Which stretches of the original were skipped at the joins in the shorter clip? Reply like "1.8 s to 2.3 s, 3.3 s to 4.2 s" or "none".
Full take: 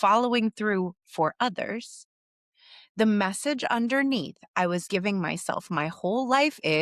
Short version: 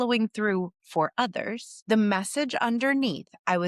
1.9 s to 2.8 s